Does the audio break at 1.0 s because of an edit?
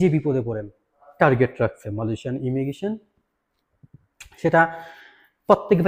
yes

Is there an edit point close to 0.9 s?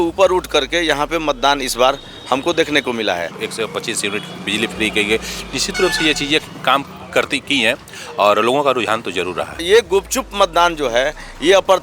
no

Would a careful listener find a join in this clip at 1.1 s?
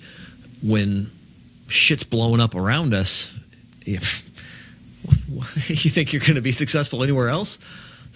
no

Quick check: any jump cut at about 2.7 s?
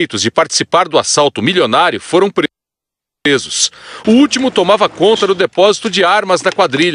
yes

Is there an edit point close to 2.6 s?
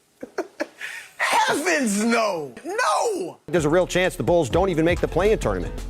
yes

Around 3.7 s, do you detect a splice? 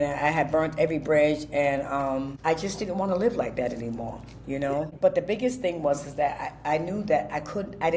no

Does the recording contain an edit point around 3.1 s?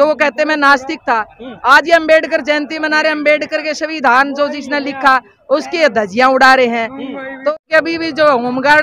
no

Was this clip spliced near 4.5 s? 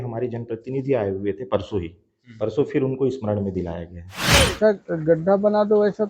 yes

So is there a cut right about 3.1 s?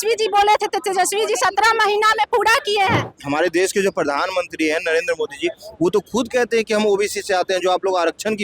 yes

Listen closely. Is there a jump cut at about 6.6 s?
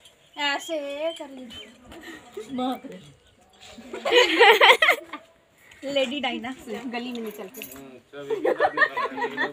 yes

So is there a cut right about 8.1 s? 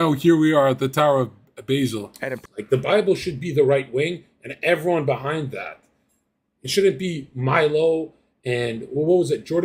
no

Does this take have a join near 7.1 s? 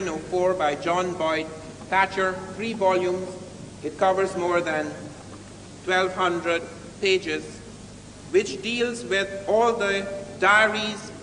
yes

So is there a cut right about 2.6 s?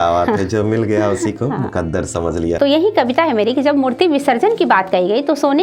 yes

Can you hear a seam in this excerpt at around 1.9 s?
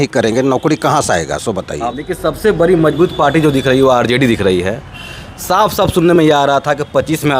yes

